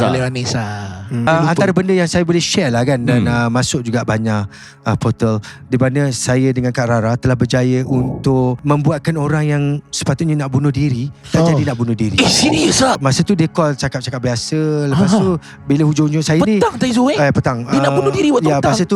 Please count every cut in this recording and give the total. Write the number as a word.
three